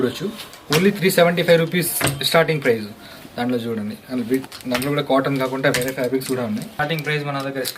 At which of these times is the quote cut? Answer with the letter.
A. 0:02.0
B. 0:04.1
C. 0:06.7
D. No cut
C